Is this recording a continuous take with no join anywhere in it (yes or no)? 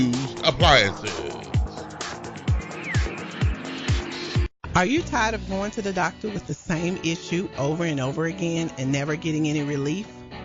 no